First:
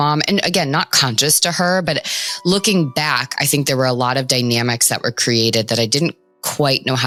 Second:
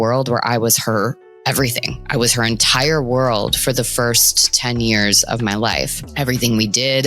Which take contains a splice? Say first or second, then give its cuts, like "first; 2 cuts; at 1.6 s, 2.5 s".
second; 1 cut; at 6.0 s